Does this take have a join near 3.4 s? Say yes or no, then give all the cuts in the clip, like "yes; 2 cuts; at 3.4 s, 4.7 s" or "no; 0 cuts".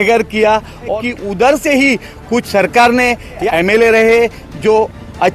yes; 3 cuts; at 1.0 s, 3.4 s, 4.4 s